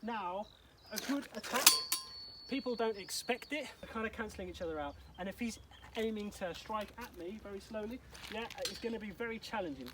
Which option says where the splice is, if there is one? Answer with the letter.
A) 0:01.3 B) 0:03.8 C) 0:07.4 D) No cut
B